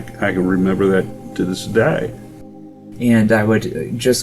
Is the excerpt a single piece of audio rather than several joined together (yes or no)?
no